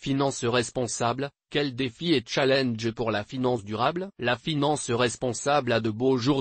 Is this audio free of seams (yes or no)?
yes